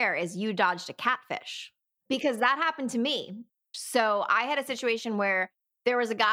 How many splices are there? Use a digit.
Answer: 2